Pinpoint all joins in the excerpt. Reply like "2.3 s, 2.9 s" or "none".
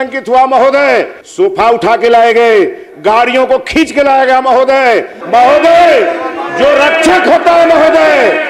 1.2 s, 5.1 s